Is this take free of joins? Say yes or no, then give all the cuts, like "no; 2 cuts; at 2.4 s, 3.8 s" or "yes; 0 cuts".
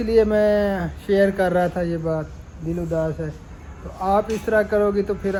yes; 0 cuts